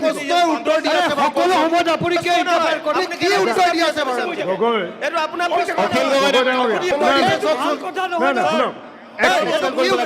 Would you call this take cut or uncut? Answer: cut